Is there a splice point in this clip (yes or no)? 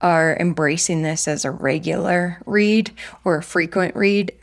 no